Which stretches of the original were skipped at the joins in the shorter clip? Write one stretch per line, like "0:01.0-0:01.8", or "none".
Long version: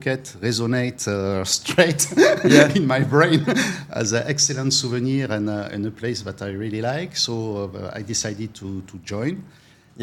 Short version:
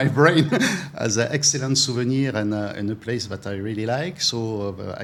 none